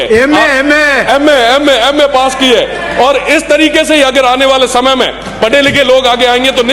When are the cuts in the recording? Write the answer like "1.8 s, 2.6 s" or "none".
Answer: none